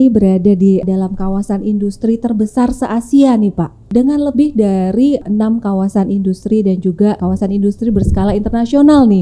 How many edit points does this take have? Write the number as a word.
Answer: four